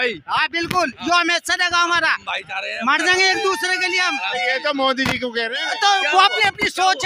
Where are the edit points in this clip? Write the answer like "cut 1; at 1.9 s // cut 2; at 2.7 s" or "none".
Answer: none